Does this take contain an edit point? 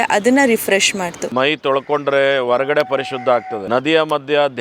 yes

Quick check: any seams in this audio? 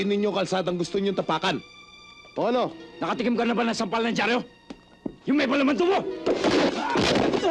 yes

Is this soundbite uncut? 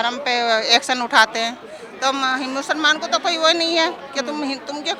yes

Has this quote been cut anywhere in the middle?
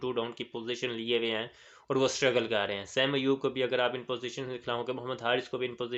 no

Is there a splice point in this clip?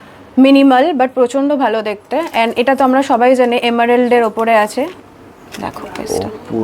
yes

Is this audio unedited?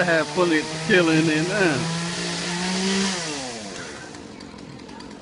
no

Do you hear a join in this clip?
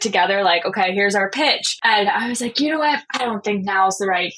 yes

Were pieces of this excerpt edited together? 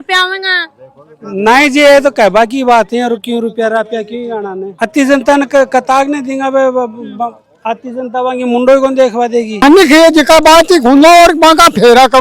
yes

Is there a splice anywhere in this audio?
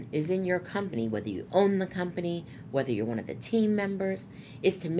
no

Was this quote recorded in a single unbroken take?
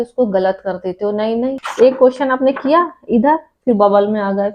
no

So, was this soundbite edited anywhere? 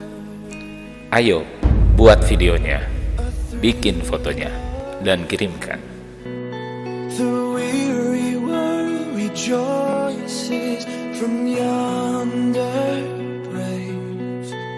no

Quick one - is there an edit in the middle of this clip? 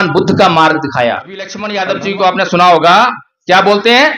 yes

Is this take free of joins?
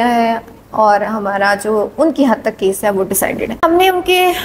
no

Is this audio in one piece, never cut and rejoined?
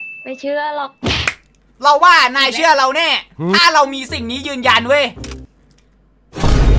no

